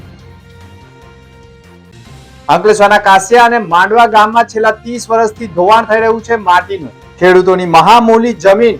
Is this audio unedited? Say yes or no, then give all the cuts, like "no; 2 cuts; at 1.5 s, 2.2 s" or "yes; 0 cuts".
no; 1 cut; at 1.7 s